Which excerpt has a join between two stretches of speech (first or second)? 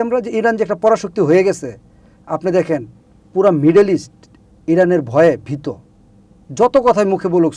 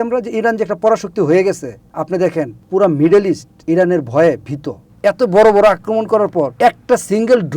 second